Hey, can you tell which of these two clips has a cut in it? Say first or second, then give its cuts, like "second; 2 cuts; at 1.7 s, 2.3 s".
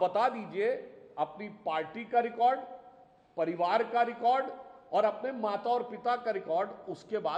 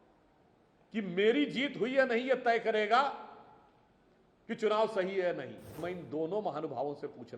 second; 1 cut; at 5.8 s